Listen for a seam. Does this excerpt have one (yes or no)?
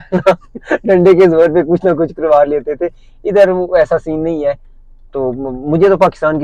no